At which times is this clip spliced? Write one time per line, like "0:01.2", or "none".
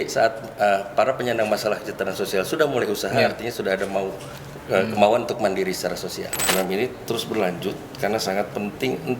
0:06.5